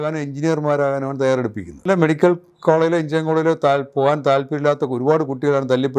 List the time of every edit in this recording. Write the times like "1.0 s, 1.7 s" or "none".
1.9 s